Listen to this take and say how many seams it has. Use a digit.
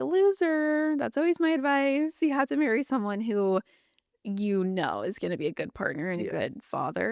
0